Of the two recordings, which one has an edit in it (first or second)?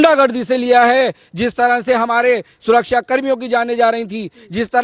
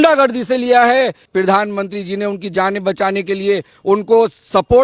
second